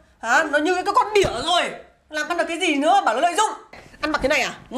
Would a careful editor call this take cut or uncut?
cut